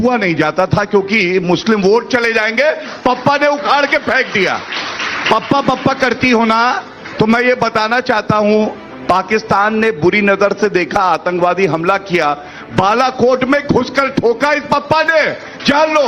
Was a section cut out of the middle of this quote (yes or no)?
no